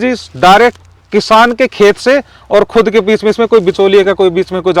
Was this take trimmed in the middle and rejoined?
no; 0 cuts

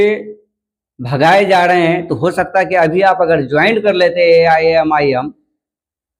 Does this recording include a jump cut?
no; 0 cuts

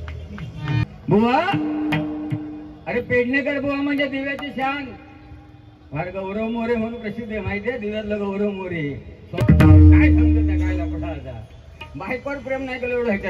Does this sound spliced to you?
yes; 2 cuts; at 0.8 s, 9.4 s

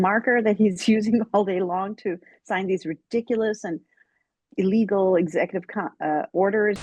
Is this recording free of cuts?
yes; 0 cuts

